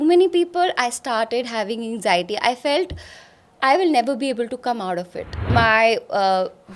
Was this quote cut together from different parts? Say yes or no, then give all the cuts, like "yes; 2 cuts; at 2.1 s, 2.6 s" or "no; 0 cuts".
yes; 1 cut; at 5.5 s